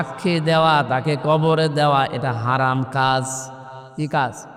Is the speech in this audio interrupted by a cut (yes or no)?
no